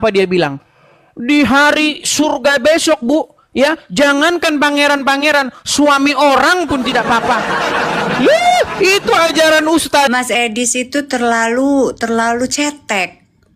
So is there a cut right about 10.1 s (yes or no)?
yes